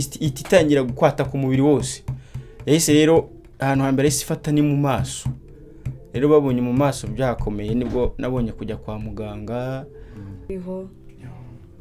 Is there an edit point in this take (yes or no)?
yes